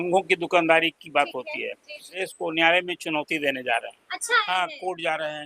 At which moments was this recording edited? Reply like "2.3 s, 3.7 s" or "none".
2.2 s, 4.5 s